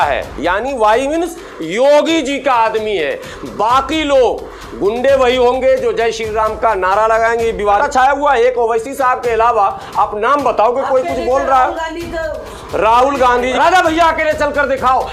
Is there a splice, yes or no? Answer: yes